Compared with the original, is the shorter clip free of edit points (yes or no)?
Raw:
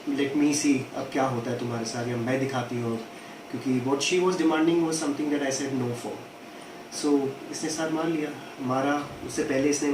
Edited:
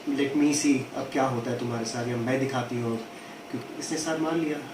no